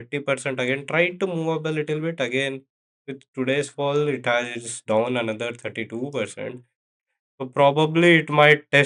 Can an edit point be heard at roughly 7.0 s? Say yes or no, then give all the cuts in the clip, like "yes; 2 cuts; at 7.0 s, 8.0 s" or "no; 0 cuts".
yes; 1 cut; at 7.0 s